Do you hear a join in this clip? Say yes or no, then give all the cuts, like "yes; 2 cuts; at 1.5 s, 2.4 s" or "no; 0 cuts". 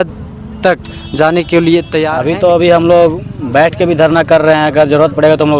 yes; 1 cut; at 2.2 s